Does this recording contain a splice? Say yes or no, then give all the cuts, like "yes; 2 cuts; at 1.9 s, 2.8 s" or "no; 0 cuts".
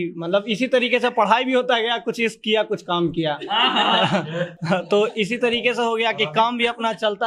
no; 0 cuts